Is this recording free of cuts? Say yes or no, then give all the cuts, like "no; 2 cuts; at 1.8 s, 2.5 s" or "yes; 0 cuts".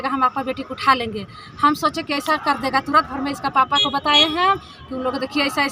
yes; 0 cuts